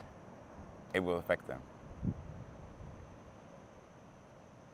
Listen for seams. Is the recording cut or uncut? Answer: uncut